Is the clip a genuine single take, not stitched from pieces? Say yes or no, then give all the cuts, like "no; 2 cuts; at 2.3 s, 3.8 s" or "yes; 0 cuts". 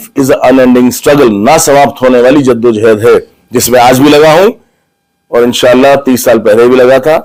yes; 0 cuts